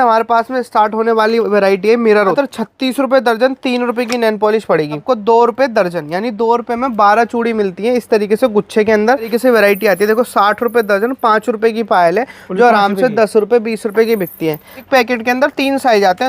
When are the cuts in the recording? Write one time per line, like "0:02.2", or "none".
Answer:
0:02.3
0:05.0
0:09.3
0:14.8